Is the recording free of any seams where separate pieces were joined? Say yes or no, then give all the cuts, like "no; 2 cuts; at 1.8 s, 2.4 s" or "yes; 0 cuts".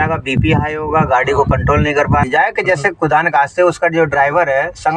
no; 1 cut; at 2.3 s